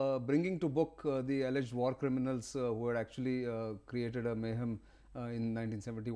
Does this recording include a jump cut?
no; 0 cuts

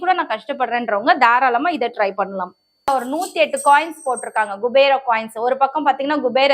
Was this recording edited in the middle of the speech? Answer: yes; 1 cut; at 2.9 s

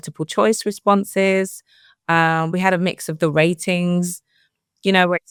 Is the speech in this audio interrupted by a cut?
no; 0 cuts

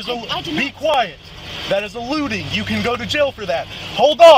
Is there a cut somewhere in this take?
no; 0 cuts

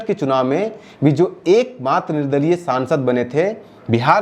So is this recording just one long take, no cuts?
yes; 0 cuts

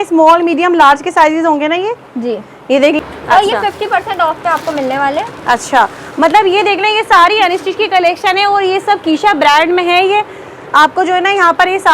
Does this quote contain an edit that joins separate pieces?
yes; 1 cut; at 3.0 s

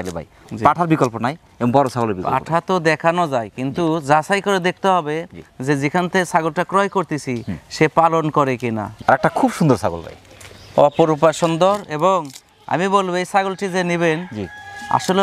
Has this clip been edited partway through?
yes; 1 cut; at 8.9 s

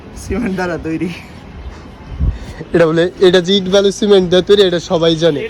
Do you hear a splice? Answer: no; 0 cuts

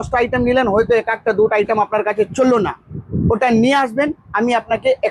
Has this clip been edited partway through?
no; 0 cuts

